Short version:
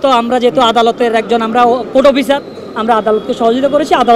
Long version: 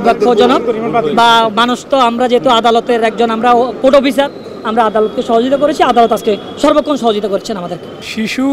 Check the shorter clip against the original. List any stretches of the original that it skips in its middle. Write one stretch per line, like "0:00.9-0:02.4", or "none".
none